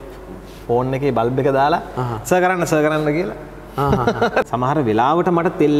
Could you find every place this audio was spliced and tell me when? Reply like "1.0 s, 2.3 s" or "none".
4.4 s

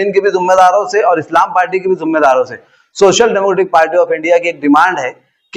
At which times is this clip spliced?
none

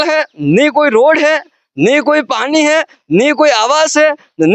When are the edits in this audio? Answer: none

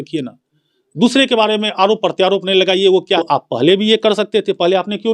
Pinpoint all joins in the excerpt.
3.2 s

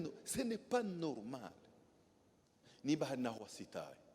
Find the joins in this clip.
2.6 s

